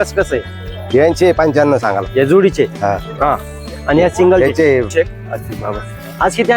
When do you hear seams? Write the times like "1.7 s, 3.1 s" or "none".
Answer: 4.9 s